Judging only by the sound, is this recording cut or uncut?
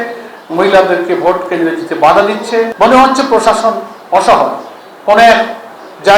cut